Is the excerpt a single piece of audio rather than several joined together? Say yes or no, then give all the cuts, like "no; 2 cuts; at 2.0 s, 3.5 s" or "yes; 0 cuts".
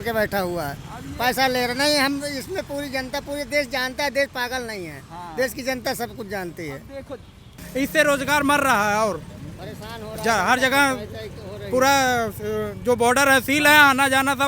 no; 1 cut; at 7.6 s